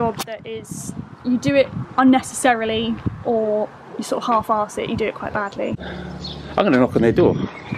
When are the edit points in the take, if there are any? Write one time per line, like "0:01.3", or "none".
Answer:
0:05.7

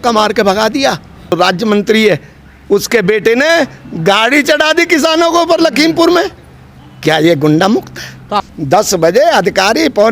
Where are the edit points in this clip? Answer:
0:01.3
0:08.3

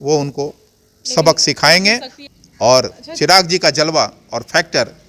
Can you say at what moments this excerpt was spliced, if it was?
0:02.1

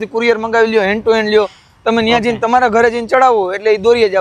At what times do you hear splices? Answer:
none

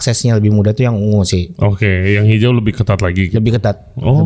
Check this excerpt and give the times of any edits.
none

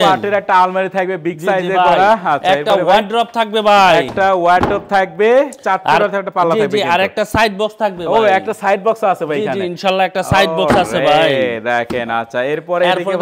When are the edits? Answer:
none

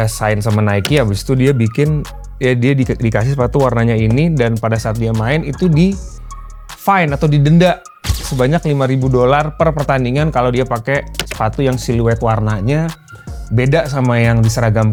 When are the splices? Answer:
none

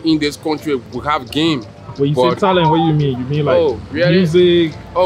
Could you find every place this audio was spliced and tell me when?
none

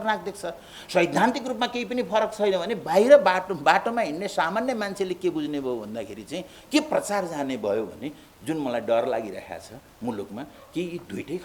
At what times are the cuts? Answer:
none

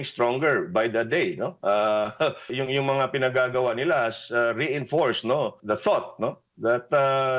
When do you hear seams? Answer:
0:02.5
0:05.6

